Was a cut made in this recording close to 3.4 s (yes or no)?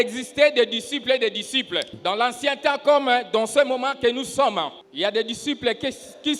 no